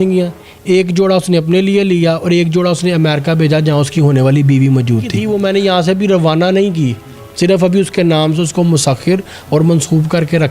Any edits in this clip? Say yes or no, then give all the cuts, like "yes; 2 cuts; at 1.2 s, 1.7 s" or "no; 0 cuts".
yes; 1 cut; at 5.2 s